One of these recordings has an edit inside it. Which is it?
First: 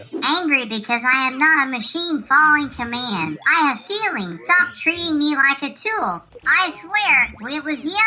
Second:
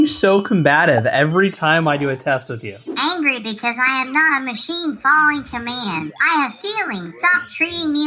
first; 1 cut; at 6.4 s

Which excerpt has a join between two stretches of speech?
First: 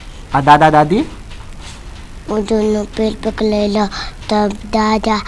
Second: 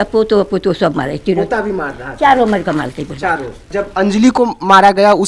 second; 1 cut; at 3.7 s

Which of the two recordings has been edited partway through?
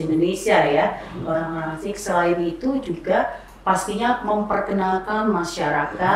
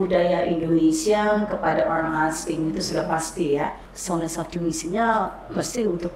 second; 1 cut; at 3.9 s

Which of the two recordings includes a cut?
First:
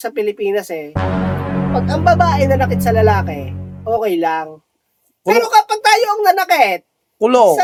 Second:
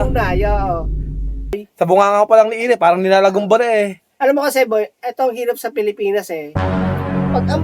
second; 1 cut; at 1.6 s

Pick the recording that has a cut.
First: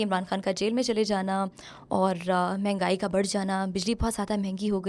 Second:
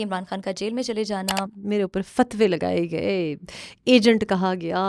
second; 1 cut; at 1.6 s

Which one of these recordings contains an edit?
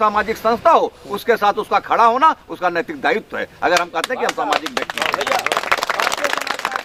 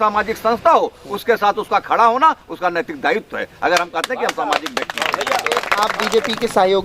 second; 1 cut; at 5.9 s

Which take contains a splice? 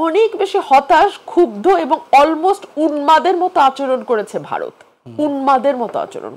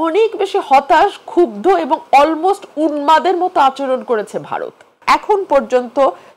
second; 1 cut; at 5.0 s

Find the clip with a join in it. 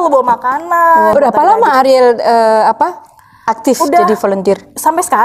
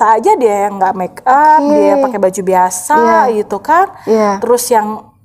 first; 1 cut; at 1.1 s

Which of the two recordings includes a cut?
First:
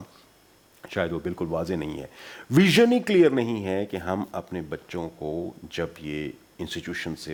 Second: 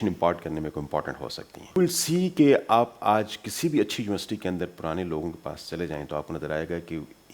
second; 1 cut; at 1.8 s

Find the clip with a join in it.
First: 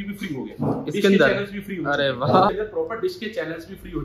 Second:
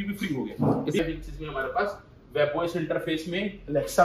second; 1 cut; at 1.0 s

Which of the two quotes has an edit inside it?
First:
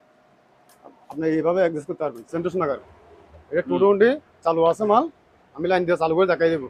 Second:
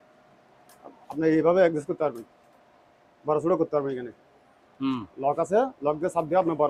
first; 1 cut; at 2.2 s

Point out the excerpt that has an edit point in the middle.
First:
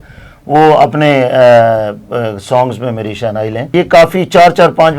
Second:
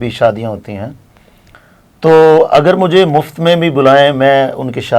first; 1 cut; at 3.7 s

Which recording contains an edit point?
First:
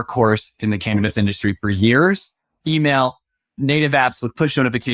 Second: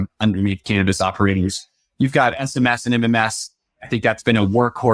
first; 2 cuts; at 2.5 s, 3.6 s

